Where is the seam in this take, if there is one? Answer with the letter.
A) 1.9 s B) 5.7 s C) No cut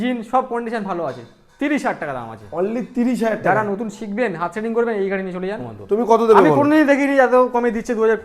B